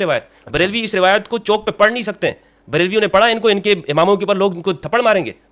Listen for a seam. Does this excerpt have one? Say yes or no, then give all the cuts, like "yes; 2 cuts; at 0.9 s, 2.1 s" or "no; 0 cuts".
no; 0 cuts